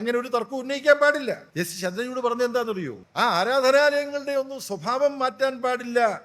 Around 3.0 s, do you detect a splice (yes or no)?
yes